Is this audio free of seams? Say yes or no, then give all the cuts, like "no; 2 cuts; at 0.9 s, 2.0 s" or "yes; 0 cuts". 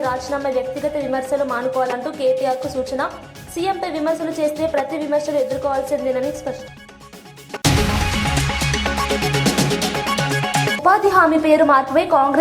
no; 1 cut; at 6.6 s